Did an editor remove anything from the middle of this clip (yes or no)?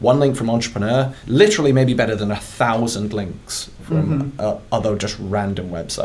yes